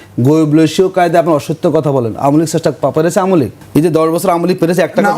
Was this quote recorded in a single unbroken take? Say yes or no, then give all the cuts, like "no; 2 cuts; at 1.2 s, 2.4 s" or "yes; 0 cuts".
no; 1 cut; at 3.6 s